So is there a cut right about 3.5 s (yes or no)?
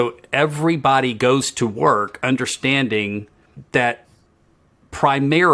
yes